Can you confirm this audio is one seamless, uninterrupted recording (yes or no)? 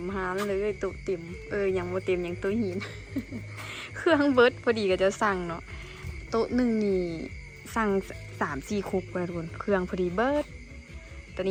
yes